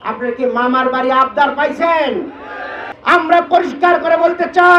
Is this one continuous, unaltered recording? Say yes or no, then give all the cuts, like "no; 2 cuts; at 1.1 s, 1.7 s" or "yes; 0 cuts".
no; 1 cut; at 2.9 s